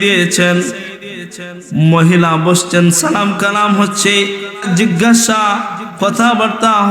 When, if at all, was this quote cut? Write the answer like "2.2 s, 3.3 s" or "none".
4.6 s

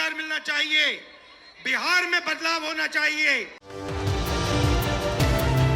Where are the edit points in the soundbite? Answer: none

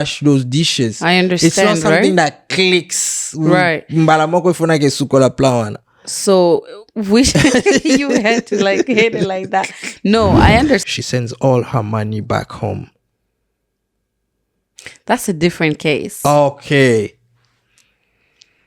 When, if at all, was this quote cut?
10.9 s

